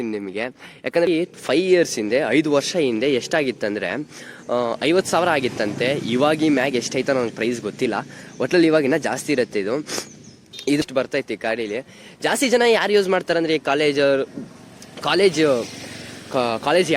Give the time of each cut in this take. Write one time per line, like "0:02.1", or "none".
0:01.1
0:10.8

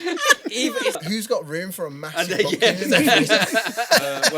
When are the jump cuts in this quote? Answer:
0:01.0

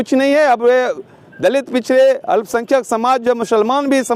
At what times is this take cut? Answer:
none

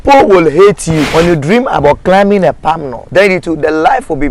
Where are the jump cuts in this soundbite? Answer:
0:01.1
0:02.9

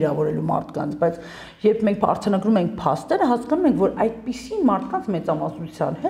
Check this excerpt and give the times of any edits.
none

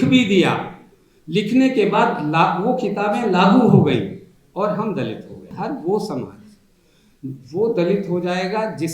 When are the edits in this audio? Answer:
0:05.5

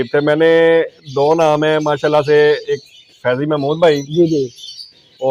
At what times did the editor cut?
none

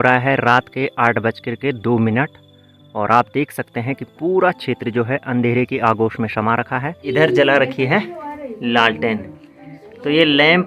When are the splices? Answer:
0:07.1

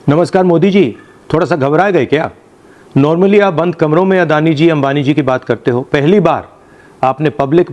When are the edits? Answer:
none

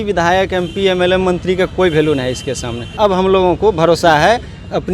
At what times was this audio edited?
0:02.9

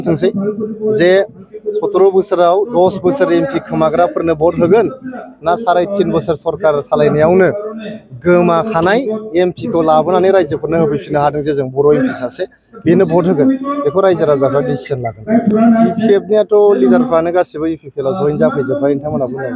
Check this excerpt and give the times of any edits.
0:15.2

